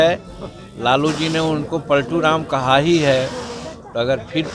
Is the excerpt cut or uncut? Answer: uncut